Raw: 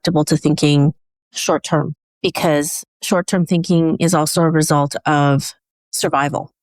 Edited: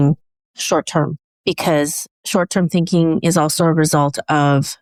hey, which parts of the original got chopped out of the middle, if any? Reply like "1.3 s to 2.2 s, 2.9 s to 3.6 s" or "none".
none